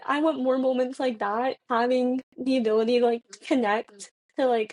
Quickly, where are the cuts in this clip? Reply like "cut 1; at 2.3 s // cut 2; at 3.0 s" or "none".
cut 1; at 1.6 s